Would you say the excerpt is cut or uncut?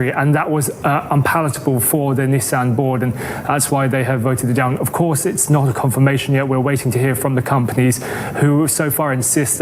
uncut